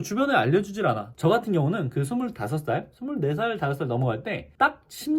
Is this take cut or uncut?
cut